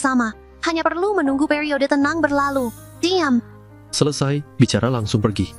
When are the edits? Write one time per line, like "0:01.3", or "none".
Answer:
none